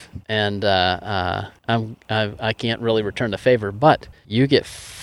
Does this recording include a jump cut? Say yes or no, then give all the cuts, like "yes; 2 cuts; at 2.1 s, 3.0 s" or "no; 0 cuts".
no; 0 cuts